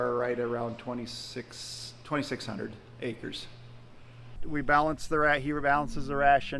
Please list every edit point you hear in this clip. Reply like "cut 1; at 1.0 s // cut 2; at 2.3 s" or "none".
cut 1; at 4.4 s